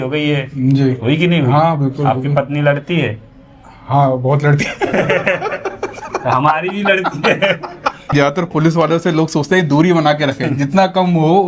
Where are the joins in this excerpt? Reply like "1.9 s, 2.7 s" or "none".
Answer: 8.1 s